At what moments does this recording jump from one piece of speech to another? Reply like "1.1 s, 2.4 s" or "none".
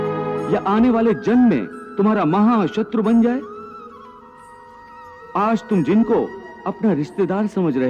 none